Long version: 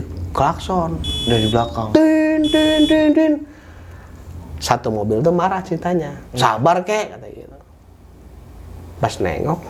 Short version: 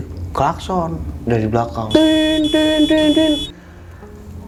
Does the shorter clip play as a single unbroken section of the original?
yes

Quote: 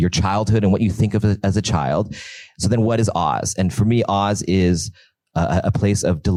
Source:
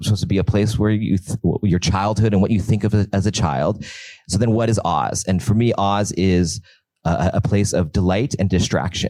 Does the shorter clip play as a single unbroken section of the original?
yes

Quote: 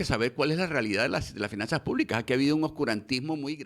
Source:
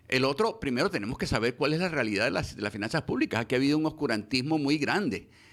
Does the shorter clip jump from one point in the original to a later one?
no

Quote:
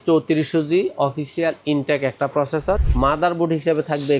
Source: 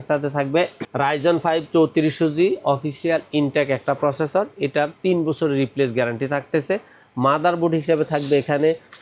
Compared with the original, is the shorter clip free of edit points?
no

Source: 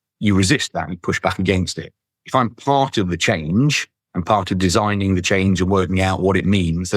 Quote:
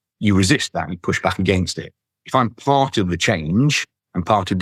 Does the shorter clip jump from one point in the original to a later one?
no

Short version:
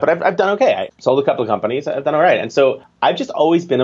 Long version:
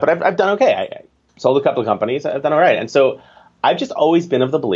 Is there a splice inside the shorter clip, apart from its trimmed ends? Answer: yes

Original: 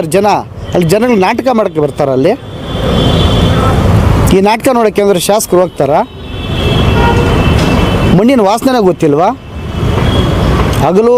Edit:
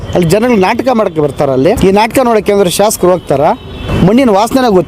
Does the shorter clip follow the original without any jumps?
no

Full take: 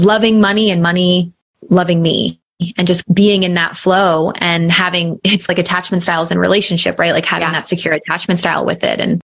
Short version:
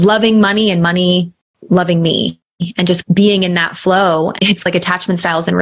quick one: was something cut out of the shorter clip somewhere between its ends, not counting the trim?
yes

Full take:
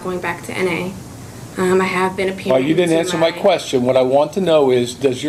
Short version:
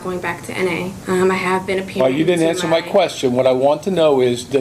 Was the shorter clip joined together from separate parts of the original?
yes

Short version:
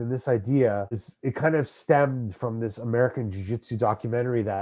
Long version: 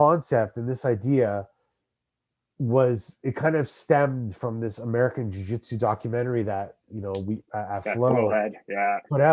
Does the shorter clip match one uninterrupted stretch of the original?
no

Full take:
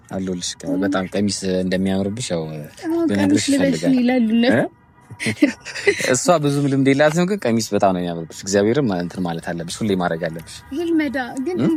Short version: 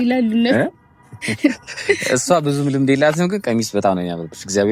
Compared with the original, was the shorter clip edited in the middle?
no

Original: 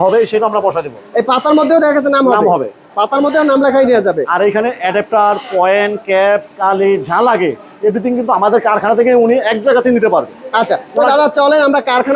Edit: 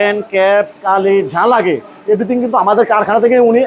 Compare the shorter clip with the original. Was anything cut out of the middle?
no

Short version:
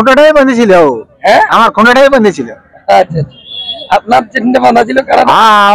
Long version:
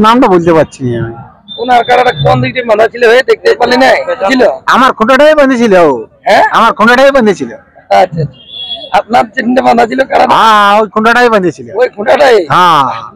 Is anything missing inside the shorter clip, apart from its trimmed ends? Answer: no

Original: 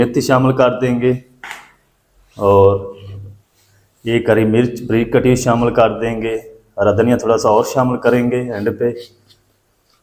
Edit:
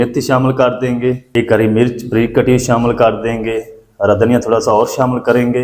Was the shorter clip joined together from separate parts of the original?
yes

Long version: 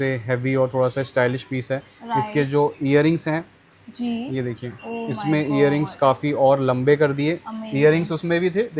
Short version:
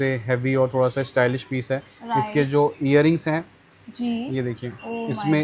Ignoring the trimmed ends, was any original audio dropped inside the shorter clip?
no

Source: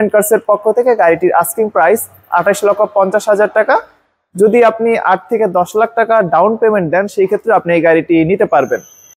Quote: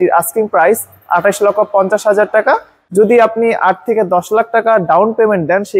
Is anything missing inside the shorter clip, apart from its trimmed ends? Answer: yes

